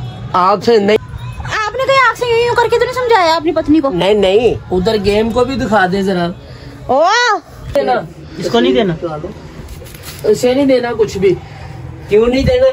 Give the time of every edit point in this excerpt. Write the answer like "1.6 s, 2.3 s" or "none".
1.0 s, 3.2 s, 7.7 s